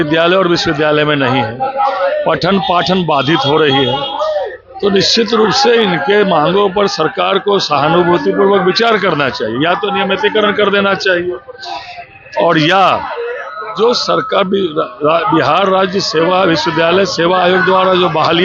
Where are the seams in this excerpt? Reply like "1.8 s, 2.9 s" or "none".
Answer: none